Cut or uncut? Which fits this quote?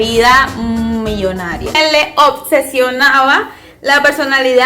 cut